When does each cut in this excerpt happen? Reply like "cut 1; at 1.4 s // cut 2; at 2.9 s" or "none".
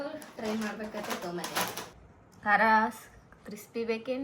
cut 1; at 1.9 s